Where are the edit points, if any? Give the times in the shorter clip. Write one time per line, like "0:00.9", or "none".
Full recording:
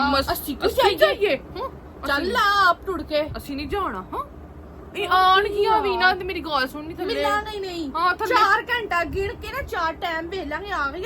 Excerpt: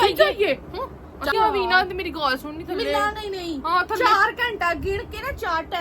0:01.3